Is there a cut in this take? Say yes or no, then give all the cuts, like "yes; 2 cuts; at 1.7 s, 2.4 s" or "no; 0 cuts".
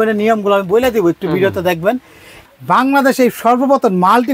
yes; 1 cut; at 2.4 s